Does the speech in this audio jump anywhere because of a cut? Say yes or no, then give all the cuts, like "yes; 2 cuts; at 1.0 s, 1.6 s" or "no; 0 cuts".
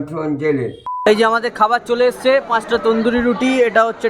yes; 1 cut; at 0.9 s